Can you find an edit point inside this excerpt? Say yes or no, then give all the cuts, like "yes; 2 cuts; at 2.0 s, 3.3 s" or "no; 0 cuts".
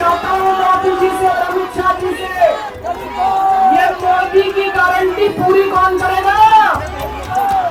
no; 0 cuts